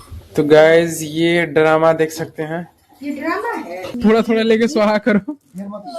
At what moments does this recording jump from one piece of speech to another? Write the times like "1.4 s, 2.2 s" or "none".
3.9 s